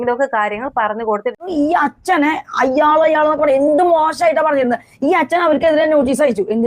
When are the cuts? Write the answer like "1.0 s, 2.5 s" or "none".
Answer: 1.5 s